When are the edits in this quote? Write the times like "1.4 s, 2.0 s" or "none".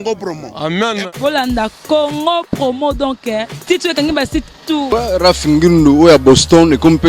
4.9 s